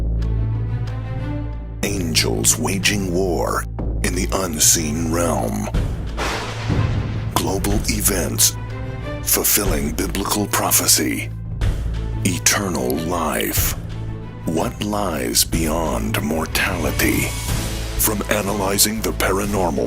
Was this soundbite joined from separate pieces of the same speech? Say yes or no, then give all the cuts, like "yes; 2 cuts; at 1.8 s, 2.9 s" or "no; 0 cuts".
no; 0 cuts